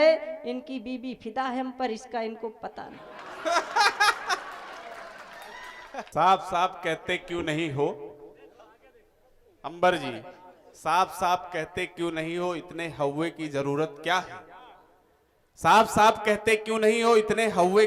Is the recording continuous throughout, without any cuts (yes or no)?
yes